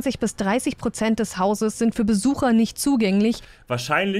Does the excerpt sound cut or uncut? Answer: uncut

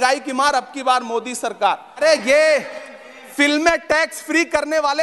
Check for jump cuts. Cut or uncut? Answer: cut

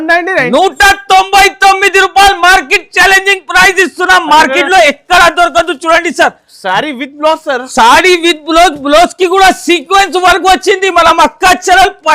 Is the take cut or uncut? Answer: uncut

